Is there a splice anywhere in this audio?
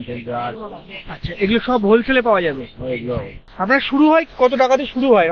yes; 1 cut; at 3.4 s

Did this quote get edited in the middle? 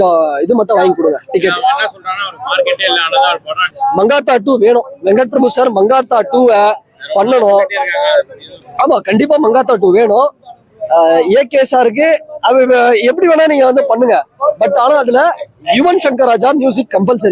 yes; 1 cut; at 3.7 s

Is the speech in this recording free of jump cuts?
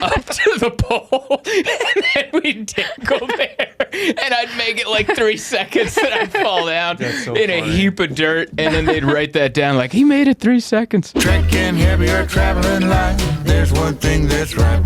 no; 1 cut; at 11.1 s

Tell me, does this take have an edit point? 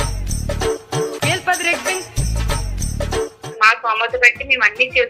yes; 1 cut; at 3.5 s

